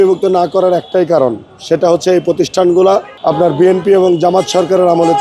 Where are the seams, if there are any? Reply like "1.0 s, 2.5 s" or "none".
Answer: none

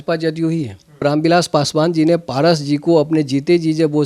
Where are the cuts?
1.0 s

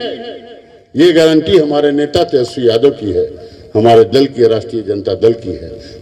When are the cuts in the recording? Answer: none

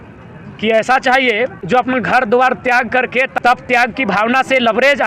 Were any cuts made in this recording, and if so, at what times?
1.6 s, 3.3 s

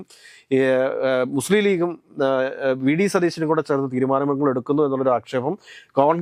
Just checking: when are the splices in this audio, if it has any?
none

